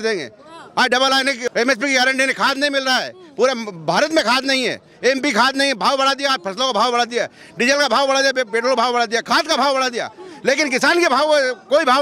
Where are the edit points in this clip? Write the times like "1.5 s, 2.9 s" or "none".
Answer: 1.5 s